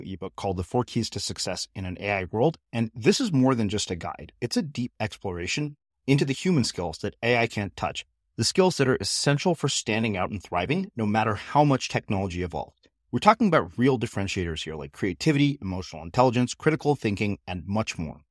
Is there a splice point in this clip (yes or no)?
no